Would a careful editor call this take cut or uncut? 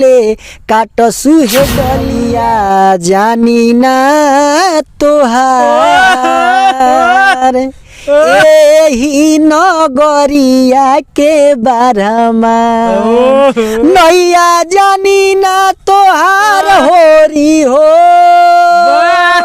cut